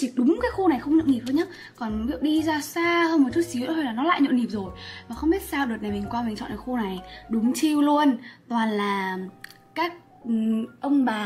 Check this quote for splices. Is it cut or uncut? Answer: uncut